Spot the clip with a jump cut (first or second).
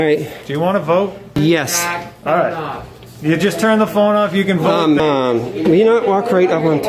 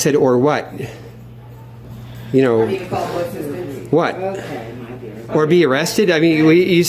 first